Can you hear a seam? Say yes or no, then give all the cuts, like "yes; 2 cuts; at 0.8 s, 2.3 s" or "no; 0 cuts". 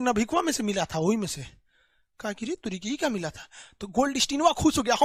no; 0 cuts